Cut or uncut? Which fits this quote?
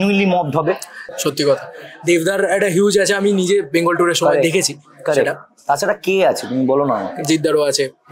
cut